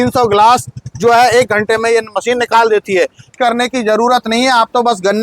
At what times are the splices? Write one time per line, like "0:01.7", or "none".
0:03.3